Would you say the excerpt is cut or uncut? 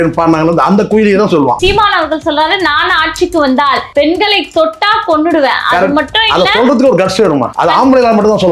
cut